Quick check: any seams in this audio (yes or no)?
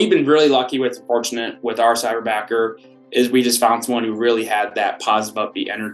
no